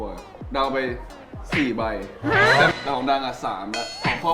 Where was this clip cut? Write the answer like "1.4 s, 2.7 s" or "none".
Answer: 2.7 s